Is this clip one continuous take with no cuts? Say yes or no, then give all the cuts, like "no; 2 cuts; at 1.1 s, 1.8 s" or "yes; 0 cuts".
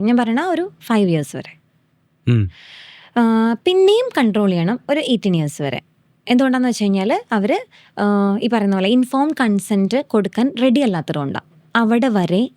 yes; 0 cuts